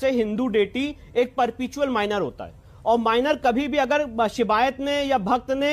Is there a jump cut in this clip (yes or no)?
no